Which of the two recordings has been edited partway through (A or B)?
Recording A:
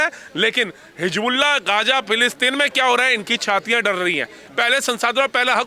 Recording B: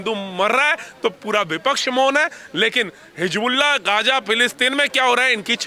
A